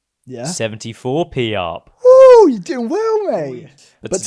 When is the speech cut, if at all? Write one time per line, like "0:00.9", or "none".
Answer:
0:03.4